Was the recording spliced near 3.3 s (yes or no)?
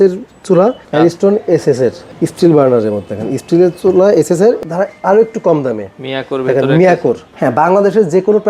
no